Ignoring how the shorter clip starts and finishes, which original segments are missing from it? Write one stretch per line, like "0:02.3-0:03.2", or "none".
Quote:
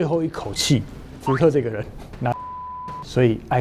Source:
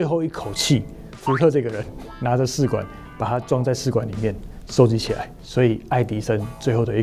0:02.6-0:05.0